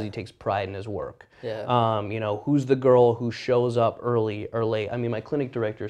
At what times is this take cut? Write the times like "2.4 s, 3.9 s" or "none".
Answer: none